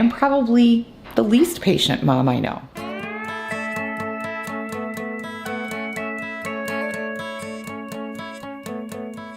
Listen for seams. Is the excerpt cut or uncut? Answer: uncut